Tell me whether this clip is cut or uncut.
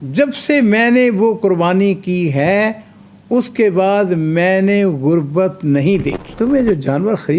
cut